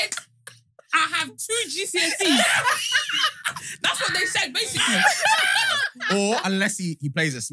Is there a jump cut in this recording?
yes; 1 cut; at 5.9 s

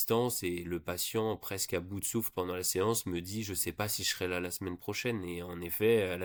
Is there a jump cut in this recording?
no; 0 cuts

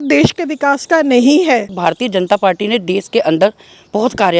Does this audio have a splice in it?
yes; 1 cut; at 1.7 s

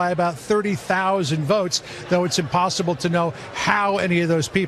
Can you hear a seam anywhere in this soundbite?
no; 0 cuts

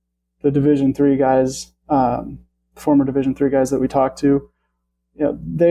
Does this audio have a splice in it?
no; 0 cuts

